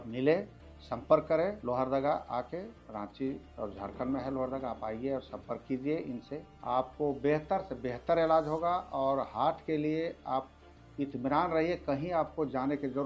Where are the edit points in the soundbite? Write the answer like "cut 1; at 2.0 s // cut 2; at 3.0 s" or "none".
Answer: cut 1; at 1.6 s // cut 2; at 2.8 s // cut 3; at 3.5 s // cut 4; at 6.5 s